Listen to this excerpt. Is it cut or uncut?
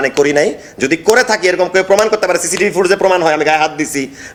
uncut